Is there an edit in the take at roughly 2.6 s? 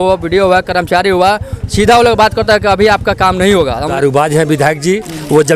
no; 1 cut; at 3.9 s

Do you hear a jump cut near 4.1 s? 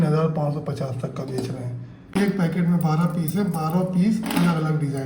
no; 1 cut; at 2.2 s

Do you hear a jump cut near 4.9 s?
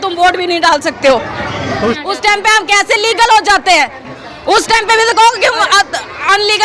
no; 1 cut; at 2.0 s

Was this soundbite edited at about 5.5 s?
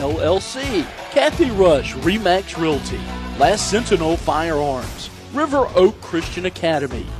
no; 1 cut; at 1.0 s

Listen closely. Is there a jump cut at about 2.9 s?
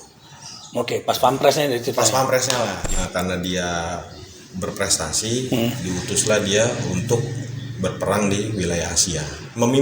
yes; 1 cut; at 2.9 s

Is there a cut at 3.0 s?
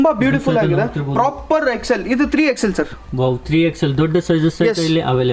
no; 0 cuts

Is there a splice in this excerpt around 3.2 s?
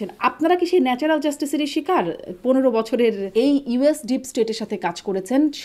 yes; 1 cut; at 3.2 s

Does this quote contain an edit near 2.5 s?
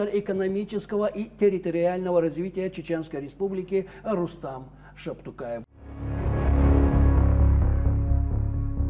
no; 1 cut; at 5.6 s

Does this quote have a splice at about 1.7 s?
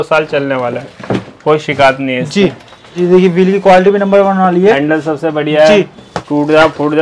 no; 2 cuts; at 2.9 s, 6.0 s

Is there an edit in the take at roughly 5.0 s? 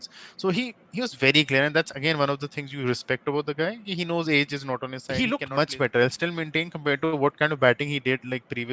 yes; 1 cut; at 5.0 s

